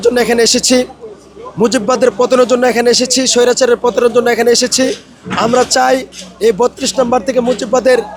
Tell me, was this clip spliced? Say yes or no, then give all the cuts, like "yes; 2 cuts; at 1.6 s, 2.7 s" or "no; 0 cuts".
no; 0 cuts